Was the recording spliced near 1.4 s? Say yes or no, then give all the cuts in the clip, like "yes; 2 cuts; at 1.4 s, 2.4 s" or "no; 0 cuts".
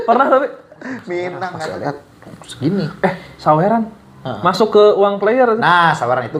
yes; 1 cut; at 1.4 s